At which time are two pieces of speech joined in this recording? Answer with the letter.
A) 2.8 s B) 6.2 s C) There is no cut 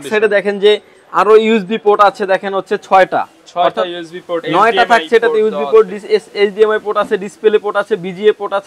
C